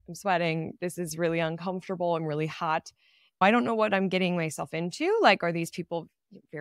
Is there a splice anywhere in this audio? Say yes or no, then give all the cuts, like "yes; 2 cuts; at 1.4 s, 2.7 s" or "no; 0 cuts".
yes; 1 cut; at 3.4 s